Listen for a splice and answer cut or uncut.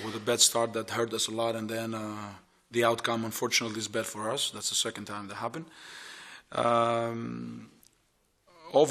cut